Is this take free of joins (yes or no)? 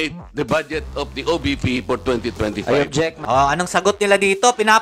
no